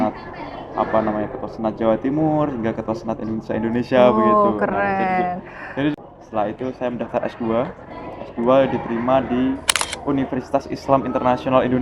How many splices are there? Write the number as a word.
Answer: one